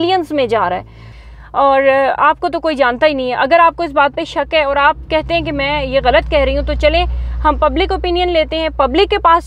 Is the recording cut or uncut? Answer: uncut